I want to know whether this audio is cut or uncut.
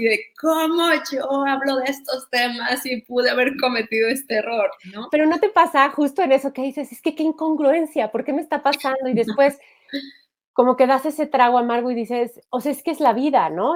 uncut